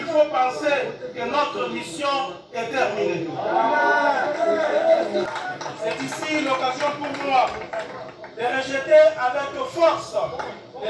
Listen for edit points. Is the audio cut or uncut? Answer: cut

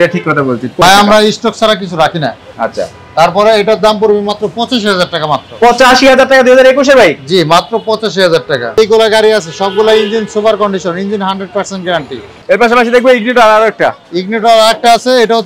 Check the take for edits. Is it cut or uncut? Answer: cut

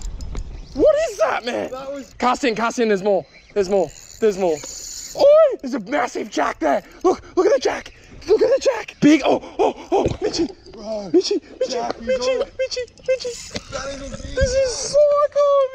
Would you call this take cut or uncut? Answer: cut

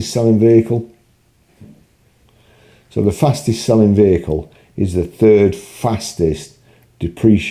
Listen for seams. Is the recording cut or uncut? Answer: uncut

